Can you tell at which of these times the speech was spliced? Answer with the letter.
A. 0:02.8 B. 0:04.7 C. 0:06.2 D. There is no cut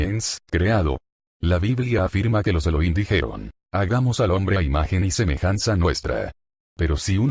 D